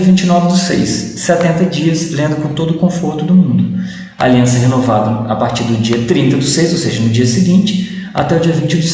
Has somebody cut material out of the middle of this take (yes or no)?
no